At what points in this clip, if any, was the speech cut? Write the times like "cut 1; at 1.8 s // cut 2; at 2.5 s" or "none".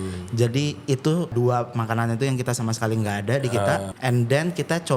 cut 1; at 1.3 s // cut 2; at 3.9 s